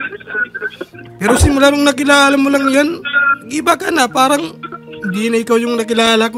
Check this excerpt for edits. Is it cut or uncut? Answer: uncut